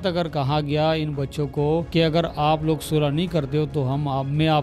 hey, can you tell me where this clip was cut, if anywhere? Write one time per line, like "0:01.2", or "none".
0:01.9

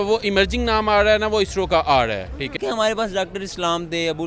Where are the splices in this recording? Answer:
0:02.6

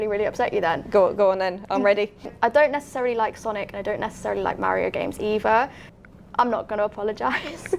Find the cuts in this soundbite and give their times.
0:02.3
0:05.8

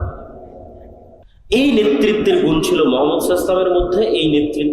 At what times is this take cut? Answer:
0:01.3

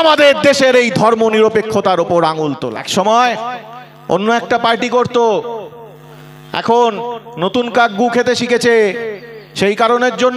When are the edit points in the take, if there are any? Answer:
0:02.7

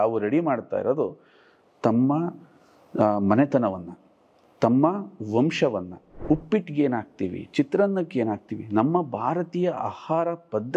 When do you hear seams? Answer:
0:06.1

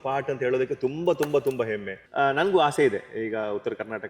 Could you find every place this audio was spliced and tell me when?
0:02.0

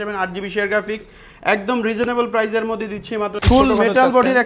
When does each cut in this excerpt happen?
0:03.4

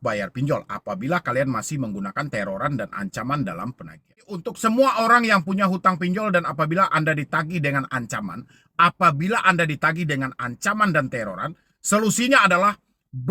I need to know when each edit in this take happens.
0:04.5

